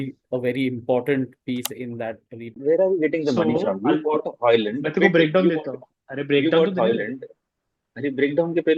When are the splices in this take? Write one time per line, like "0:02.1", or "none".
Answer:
0:02.6